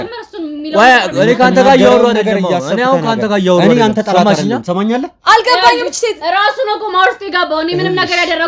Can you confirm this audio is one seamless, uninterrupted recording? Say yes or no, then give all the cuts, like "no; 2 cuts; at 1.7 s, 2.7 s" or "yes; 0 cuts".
no; 1 cut; at 5.1 s